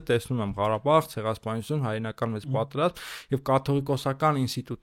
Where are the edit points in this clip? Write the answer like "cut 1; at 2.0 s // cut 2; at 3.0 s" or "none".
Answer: none